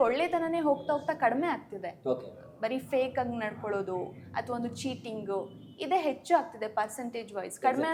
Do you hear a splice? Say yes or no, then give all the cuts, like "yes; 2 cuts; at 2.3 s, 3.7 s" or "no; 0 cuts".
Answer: no; 0 cuts